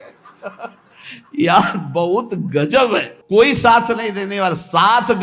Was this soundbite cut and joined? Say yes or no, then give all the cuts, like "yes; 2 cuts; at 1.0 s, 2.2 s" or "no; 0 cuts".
yes; 1 cut; at 3.2 s